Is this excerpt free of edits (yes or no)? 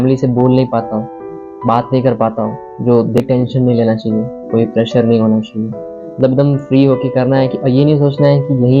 no